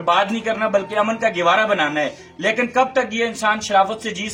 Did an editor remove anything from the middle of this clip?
no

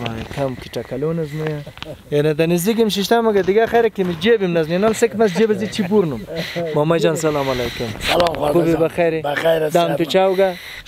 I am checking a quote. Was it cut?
no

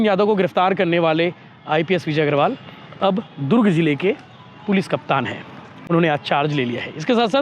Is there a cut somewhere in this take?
no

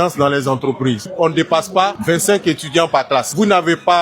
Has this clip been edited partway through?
yes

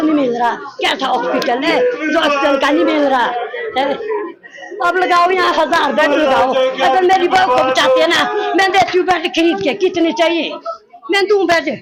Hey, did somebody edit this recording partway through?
no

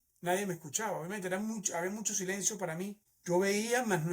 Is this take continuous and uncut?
no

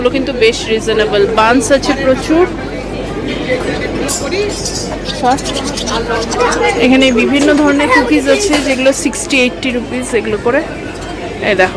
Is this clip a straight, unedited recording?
yes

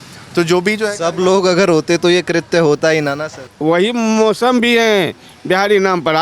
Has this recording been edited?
yes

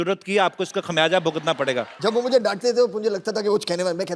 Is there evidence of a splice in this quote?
yes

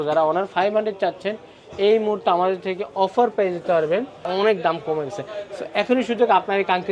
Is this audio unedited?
no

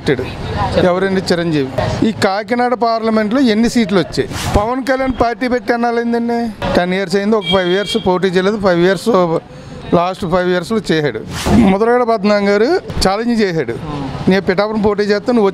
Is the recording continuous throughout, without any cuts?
no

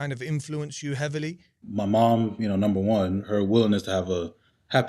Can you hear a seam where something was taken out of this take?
yes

